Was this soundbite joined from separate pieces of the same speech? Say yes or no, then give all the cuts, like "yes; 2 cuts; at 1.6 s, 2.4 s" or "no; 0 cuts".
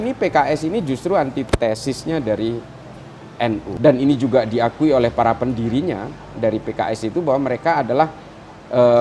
yes; 1 cut; at 3.7 s